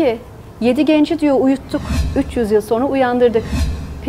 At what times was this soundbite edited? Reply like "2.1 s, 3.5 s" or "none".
2.0 s